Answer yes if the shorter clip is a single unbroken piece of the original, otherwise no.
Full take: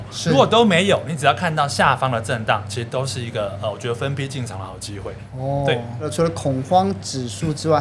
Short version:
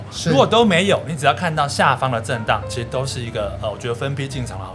yes